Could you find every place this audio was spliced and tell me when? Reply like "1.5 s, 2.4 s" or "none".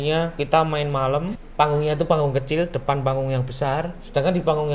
1.4 s